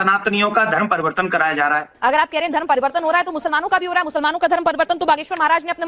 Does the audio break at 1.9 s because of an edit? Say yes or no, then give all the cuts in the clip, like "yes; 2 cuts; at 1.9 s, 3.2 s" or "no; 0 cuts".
yes; 1 cut; at 1.9 s